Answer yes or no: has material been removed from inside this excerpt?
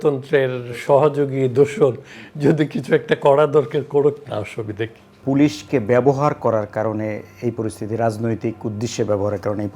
yes